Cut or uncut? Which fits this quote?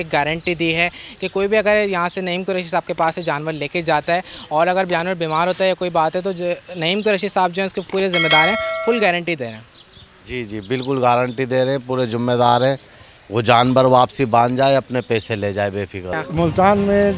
cut